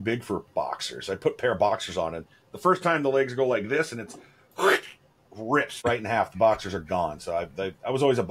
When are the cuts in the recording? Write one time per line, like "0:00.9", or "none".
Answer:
none

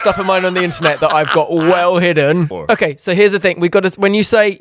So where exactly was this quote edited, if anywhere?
0:02.5

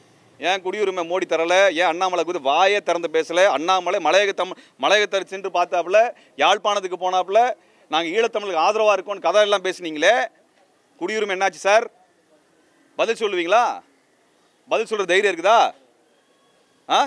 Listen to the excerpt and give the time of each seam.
none

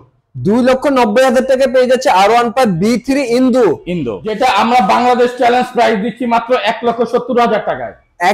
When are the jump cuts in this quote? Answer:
0:04.2

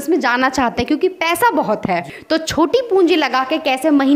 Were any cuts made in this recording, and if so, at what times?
0:02.1

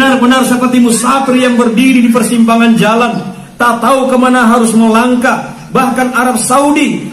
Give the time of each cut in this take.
none

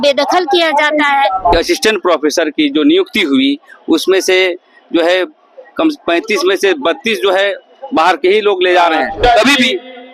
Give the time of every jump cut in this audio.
0:01.5
0:09.2

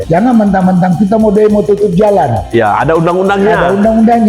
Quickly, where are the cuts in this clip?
none

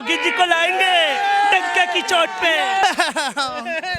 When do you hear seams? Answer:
0:02.8

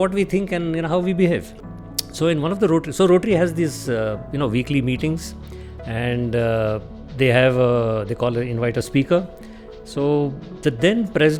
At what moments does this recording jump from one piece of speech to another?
none

